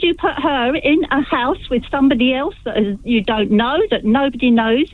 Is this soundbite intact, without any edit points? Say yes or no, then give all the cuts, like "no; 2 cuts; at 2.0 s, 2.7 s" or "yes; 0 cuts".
yes; 0 cuts